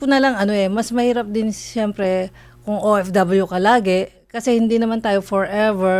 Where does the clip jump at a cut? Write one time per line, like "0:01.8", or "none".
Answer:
0:04.3